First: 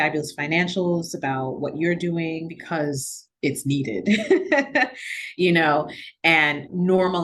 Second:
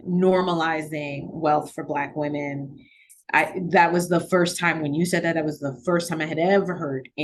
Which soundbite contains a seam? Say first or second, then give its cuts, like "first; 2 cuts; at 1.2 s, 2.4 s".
first; 1 cut; at 2.6 s